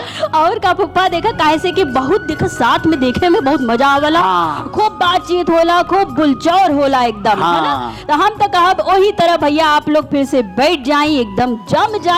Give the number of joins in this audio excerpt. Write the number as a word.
zero